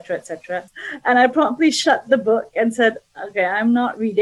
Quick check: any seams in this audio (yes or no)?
no